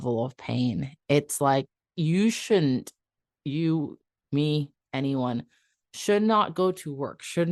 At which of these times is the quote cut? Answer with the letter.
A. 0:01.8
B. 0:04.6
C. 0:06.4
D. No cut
A